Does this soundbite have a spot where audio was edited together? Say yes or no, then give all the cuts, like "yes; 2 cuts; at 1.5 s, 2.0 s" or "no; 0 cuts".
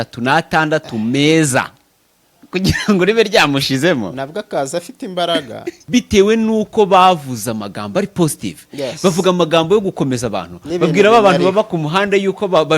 yes; 1 cut; at 5.7 s